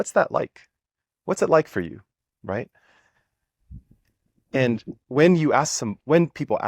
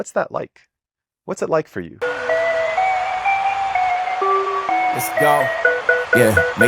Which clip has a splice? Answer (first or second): second